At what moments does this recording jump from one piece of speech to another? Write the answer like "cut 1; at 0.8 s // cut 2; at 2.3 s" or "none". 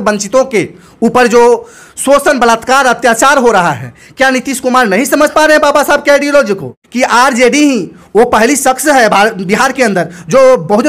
cut 1; at 6.8 s

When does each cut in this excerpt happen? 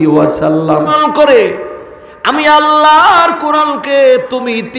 cut 1; at 1.0 s

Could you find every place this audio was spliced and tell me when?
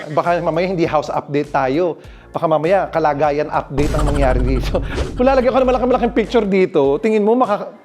cut 1; at 4.8 s

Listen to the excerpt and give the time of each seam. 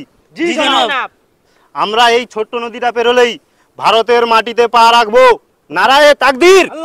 none

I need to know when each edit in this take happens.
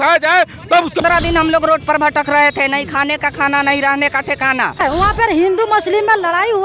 cut 1; at 1.0 s // cut 2; at 4.8 s

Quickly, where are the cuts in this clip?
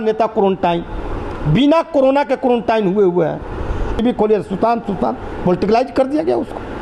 cut 1; at 4.0 s

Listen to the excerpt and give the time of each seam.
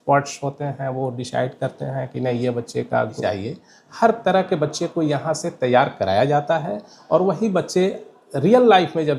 cut 1; at 3.2 s

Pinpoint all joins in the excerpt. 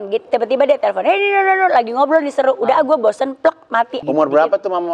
cut 1; at 4.0 s

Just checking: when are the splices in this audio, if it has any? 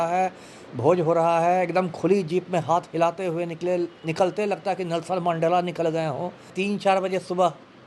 cut 1; at 6.5 s

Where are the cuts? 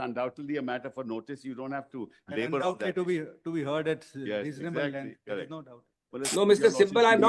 none

